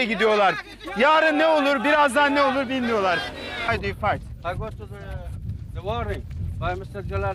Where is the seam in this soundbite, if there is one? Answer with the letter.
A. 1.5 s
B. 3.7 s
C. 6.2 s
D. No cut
B